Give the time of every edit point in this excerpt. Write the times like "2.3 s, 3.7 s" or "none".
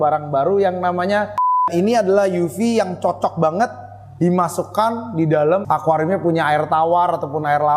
1.6 s